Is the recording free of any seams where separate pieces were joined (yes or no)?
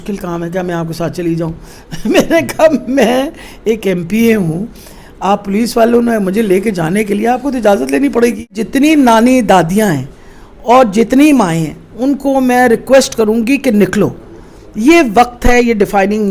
no